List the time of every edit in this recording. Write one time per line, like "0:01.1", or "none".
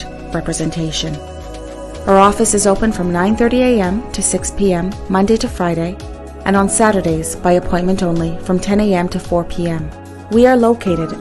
none